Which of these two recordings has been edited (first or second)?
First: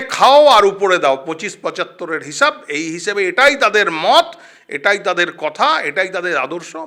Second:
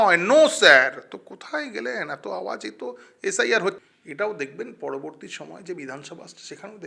second